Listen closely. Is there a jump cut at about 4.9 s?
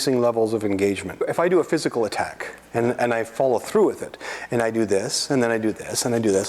no; 1 cut; at 1.2 s

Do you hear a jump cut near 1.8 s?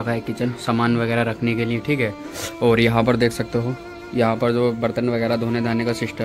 no; 0 cuts

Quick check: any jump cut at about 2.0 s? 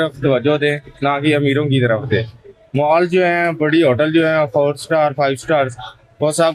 no; 0 cuts

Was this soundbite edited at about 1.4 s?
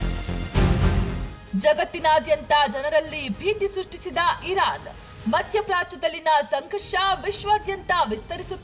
yes; 1 cut; at 1.4 s

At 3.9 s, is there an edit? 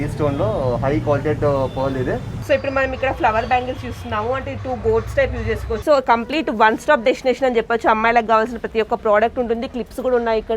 no; 2 cuts; at 2.3 s, 5.8 s

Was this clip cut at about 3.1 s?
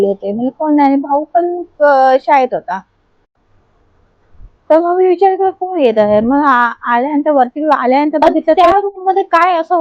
yes; 2 cuts; at 3.1 s, 8.4 s

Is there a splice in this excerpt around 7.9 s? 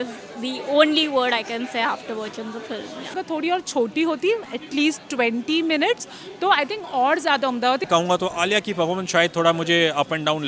yes; 2 cuts; at 3.1 s, 7.9 s

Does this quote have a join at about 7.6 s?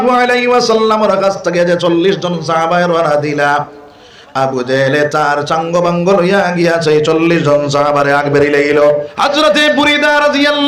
no; 1 cut; at 9.1 s

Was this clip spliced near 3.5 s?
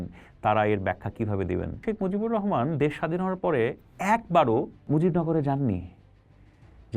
no; 2 cuts; at 1.8 s, 4.8 s

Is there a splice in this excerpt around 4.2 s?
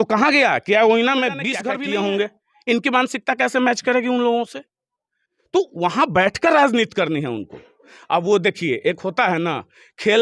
no; 1 cut; at 1.5 s

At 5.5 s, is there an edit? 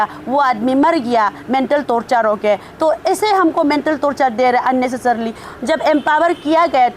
yes; 1 cut; at 5.5 s

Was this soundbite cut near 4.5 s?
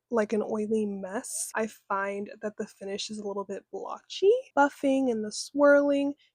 yes; 2 cuts; at 1.4 s, 4.5 s

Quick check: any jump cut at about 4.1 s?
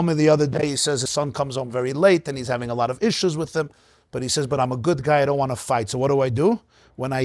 no; 1 cut; at 1.1 s

